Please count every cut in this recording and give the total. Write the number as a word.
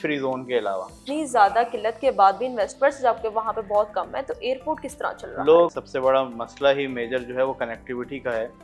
two